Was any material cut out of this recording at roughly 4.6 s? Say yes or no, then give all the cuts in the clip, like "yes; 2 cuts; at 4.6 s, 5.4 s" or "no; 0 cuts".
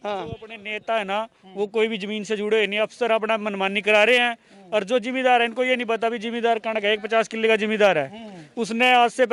no; 0 cuts